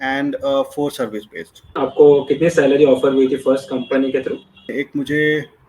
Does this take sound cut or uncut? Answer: cut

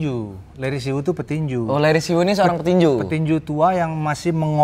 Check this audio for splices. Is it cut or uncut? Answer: uncut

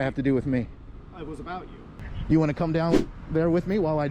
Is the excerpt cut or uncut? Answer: cut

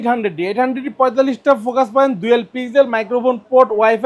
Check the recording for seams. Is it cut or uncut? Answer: uncut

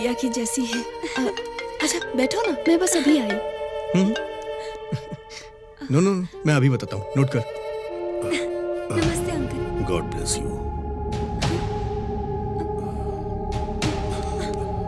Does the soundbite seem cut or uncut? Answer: uncut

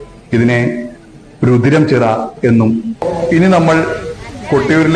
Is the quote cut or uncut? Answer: cut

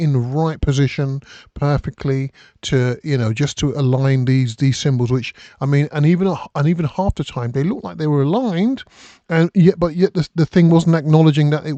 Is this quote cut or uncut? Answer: uncut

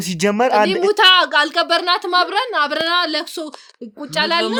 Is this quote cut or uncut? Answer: uncut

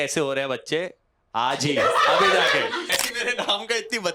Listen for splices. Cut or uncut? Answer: cut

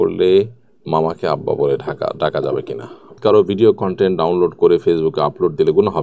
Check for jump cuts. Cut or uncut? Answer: cut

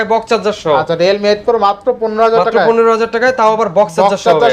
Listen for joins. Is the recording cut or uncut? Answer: uncut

